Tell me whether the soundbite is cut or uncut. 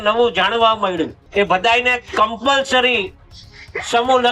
cut